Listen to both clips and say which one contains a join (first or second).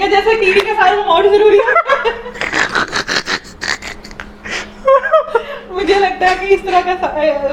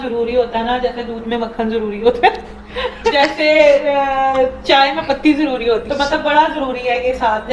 second